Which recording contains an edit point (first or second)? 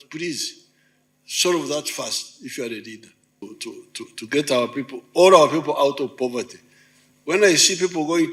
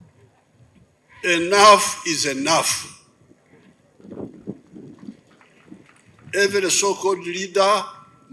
first